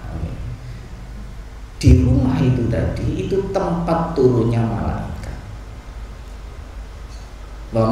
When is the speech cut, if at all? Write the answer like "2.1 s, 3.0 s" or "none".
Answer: none